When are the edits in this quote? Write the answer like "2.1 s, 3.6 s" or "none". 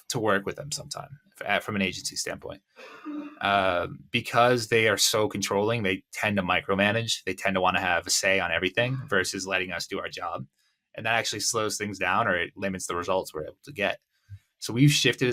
none